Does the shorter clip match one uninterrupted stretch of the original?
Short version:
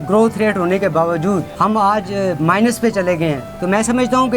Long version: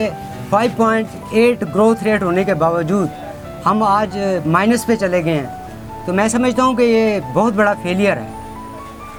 no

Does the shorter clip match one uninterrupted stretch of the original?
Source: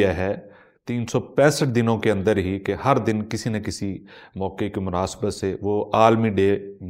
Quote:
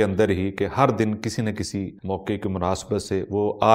no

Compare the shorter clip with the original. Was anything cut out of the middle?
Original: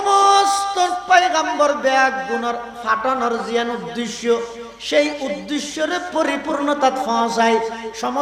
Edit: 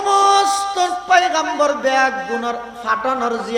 no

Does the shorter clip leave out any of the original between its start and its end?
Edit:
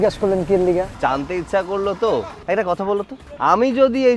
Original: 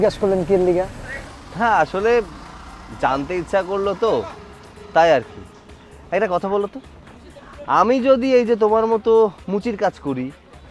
yes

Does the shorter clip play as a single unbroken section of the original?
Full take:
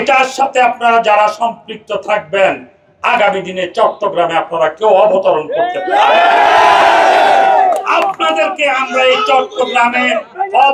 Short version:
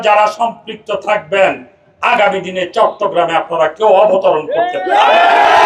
yes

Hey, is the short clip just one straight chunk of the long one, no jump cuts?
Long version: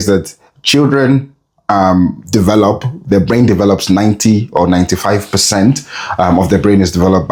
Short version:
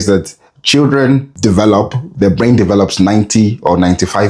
no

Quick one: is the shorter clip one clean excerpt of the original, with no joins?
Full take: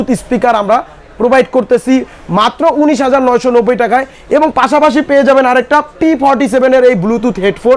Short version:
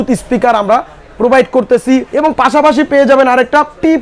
no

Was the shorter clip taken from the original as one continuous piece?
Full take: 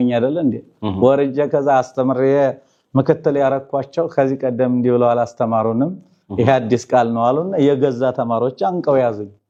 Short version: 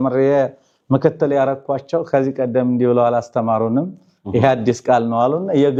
yes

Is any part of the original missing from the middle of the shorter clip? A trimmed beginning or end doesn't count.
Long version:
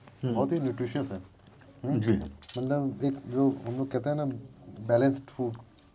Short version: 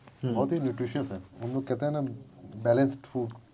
yes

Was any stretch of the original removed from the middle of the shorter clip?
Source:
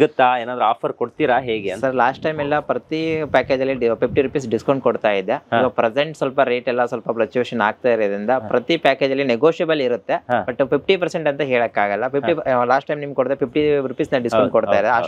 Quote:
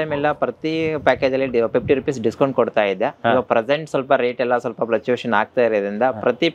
no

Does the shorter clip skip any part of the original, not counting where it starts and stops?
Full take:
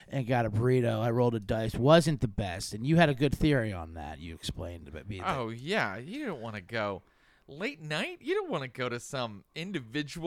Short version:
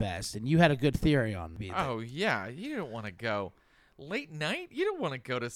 yes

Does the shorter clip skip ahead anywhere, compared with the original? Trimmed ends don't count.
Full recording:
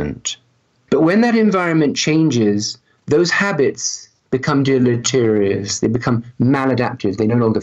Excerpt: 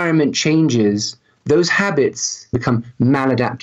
yes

